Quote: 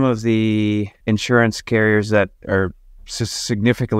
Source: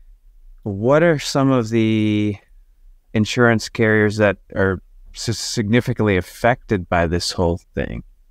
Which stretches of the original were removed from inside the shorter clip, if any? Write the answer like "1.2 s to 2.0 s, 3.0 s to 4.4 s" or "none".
2.4 s to 3.0 s